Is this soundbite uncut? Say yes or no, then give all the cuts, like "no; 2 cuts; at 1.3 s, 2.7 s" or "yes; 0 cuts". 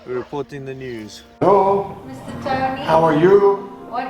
no; 1 cut; at 1.4 s